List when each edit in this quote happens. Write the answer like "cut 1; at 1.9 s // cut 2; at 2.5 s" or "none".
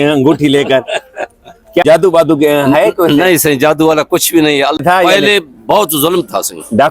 cut 1; at 1.8 s // cut 2; at 4.8 s